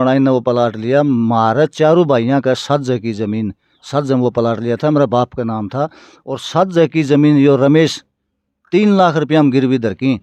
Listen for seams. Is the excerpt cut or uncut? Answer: uncut